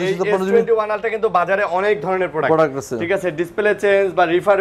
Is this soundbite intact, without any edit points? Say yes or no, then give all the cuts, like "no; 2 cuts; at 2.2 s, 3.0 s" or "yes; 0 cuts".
yes; 0 cuts